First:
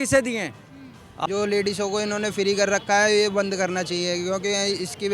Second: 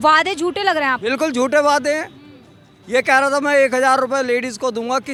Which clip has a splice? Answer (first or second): first